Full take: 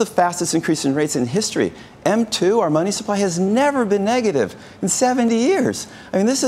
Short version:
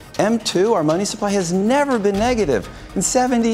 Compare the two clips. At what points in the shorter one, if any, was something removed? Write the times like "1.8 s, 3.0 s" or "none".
none